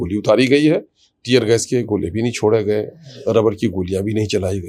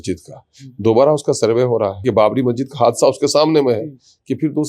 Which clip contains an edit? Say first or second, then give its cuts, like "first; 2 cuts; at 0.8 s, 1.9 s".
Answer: second; 1 cut; at 2.0 s